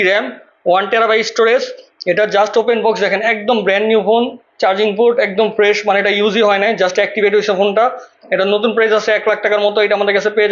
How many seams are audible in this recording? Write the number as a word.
zero